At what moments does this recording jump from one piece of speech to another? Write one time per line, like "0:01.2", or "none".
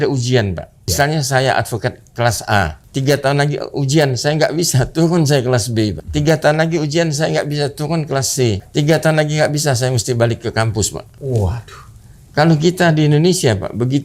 0:00.9
0:02.8
0:06.0
0:08.6
0:11.1